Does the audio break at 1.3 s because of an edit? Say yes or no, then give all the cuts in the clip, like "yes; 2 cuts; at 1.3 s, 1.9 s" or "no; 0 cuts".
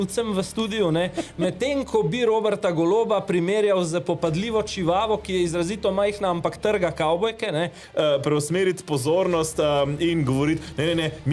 no; 1 cut; at 7.8 s